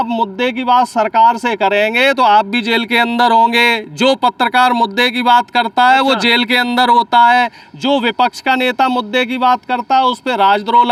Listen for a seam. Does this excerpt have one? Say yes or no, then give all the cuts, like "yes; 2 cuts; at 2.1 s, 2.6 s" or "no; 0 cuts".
no; 0 cuts